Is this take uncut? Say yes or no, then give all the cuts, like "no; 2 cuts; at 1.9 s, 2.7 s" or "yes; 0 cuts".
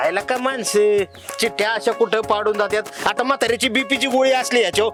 yes; 0 cuts